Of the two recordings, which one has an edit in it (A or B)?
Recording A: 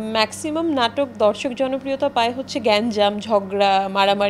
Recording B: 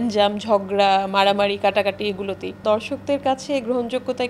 B